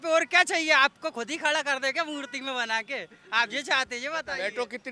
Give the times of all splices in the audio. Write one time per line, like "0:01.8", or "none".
none